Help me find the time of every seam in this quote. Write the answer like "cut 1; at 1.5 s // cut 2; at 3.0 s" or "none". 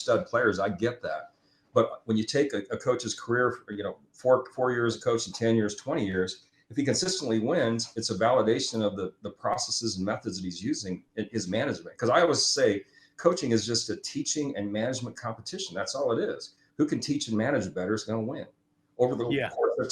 none